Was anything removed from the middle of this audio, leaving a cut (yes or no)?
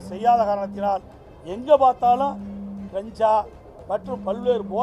no